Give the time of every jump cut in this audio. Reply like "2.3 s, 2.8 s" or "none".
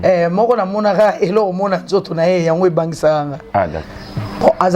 3.9 s